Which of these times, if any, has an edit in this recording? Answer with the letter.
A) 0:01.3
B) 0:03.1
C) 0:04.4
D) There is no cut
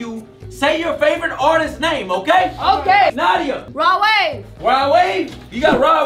B